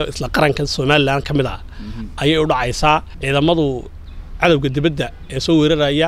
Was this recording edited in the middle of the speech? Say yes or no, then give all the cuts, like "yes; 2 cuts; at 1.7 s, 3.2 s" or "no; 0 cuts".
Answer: yes; 1 cut; at 3.1 s